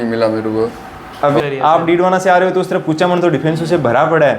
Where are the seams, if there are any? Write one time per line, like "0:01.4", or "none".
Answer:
0:01.4